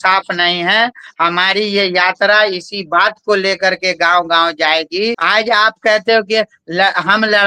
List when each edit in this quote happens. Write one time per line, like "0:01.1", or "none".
0:05.2